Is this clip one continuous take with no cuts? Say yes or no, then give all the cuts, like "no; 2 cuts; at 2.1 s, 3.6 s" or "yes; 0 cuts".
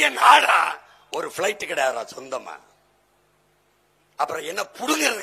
yes; 0 cuts